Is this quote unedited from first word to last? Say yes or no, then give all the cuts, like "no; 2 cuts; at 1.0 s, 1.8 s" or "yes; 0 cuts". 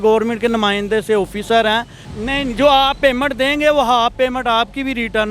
no; 1 cut; at 2.2 s